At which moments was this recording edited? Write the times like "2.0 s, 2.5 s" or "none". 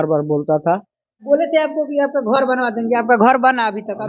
1.2 s